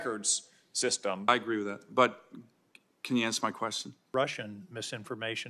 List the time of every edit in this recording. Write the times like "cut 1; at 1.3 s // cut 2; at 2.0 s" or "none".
cut 1; at 1.3 s // cut 2; at 4.0 s